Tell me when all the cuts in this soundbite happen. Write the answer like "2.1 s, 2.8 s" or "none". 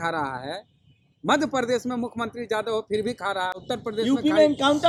none

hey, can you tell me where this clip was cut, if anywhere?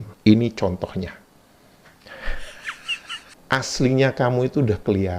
3.3 s

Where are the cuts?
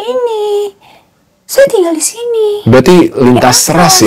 none

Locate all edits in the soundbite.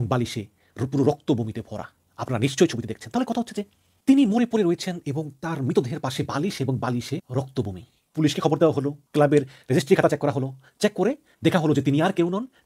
none

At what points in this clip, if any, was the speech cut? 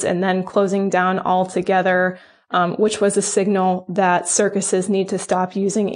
none

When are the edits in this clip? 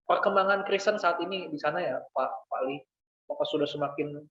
none

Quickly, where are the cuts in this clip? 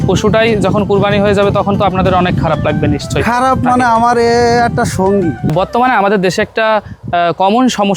5.4 s

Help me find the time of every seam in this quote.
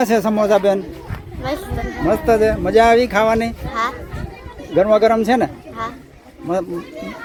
none

